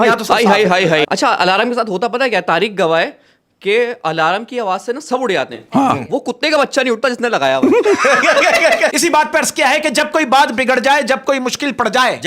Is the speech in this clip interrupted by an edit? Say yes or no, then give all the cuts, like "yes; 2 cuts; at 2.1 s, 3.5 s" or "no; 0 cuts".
yes; 2 cuts; at 1.0 s, 8.9 s